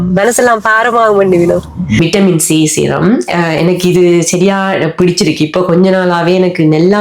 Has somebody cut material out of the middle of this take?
yes; 1 cut; at 2.0 s

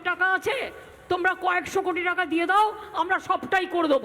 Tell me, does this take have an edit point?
yes; 1 cut; at 2.8 s

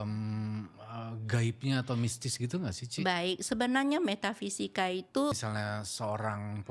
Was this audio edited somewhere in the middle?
yes; 1 cut; at 5.3 s

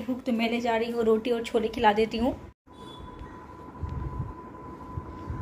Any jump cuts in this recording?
no; 0 cuts

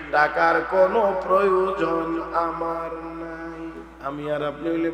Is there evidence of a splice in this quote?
yes; 1 cut; at 3.9 s

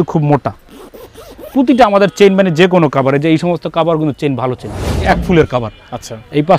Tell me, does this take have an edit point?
yes; 1 cut; at 5.1 s

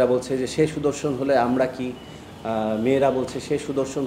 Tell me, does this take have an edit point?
no; 0 cuts

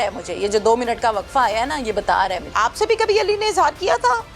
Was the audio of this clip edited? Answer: yes; 1 cut; at 2.5 s

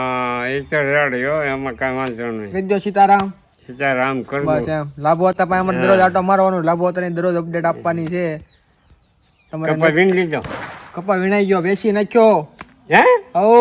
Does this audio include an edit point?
no; 0 cuts

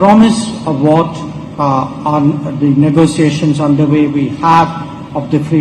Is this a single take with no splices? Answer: yes; 0 cuts

